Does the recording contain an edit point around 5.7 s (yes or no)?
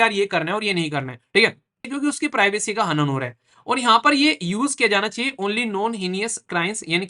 no